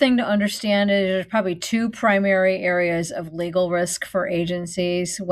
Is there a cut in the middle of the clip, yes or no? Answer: no